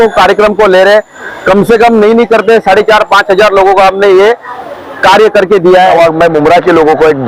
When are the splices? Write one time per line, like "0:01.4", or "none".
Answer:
0:05.9

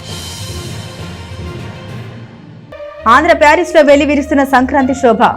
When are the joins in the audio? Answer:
0:02.1

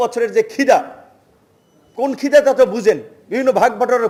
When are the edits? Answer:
none

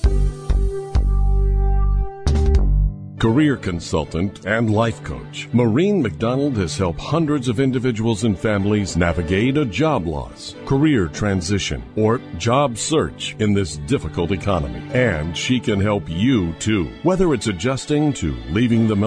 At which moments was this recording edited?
0:03.0

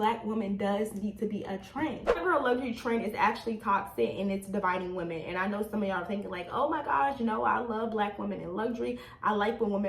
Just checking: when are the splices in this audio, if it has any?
0:02.2

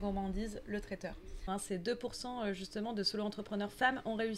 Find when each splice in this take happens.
0:01.5

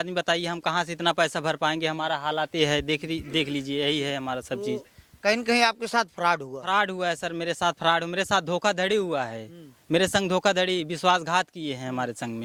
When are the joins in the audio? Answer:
none

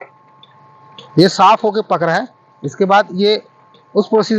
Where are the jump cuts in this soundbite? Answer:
none

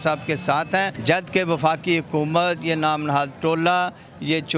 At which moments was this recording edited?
0:01.0

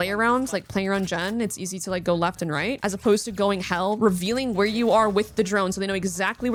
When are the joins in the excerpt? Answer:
none

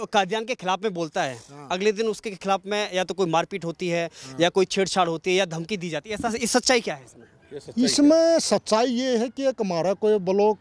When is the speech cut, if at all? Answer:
none

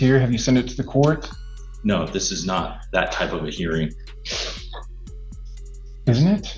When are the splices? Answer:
none

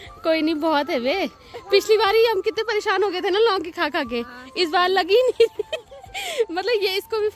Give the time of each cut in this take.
none

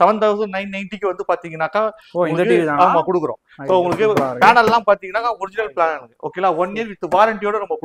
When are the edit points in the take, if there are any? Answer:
none

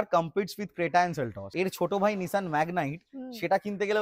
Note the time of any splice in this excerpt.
0:01.4

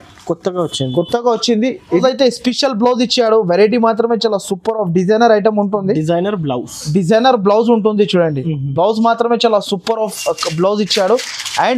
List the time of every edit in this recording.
0:02.0

